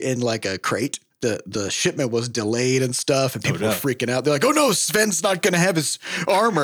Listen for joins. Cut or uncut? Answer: cut